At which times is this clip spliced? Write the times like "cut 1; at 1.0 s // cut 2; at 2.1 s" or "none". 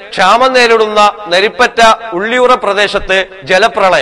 none